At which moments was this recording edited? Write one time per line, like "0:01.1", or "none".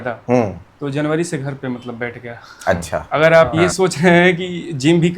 0:03.1

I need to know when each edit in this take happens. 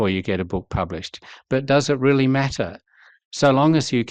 none

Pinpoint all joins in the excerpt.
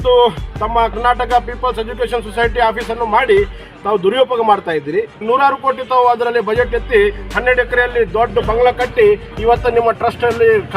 0:05.2

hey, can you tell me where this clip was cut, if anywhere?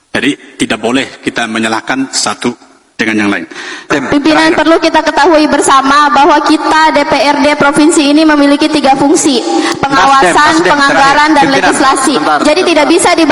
0:03.9

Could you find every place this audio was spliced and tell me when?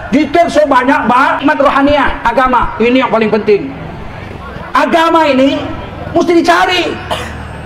0:01.4

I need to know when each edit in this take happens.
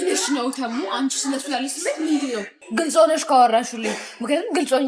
0:02.6

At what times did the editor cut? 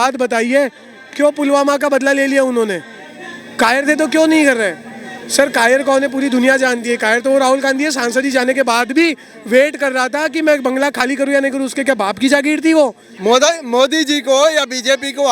0:13.1

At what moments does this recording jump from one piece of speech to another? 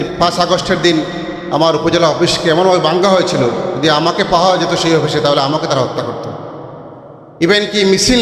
none

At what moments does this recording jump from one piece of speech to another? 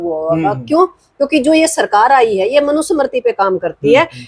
none

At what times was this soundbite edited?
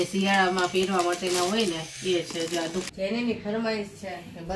0:02.9

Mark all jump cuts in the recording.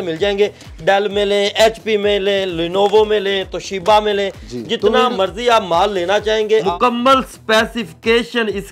0:06.7

